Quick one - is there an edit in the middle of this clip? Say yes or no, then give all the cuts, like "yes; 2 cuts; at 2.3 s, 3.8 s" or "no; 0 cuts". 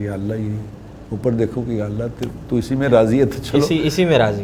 no; 0 cuts